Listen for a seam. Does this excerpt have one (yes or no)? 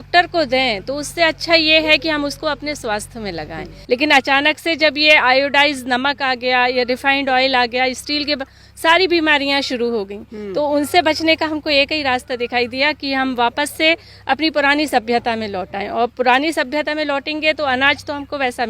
yes